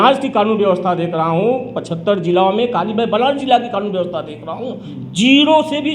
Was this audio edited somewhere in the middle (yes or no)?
no